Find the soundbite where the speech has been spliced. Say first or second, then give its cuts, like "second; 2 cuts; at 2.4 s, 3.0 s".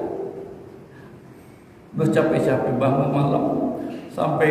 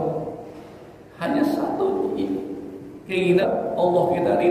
second; 1 cut; at 3.4 s